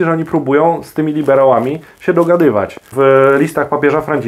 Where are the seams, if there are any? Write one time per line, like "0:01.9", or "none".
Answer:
0:02.9